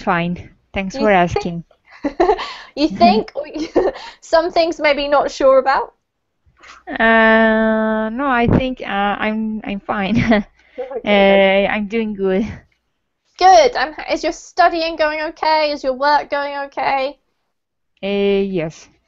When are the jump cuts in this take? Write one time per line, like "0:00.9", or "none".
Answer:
0:01.7